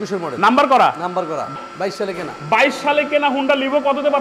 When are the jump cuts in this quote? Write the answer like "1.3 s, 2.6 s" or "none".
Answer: 1.5 s